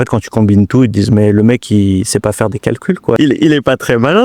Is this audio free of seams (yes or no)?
no